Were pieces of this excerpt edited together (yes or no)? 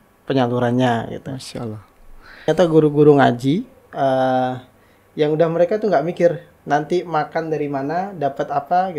yes